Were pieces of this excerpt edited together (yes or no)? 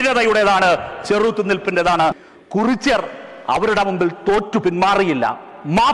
yes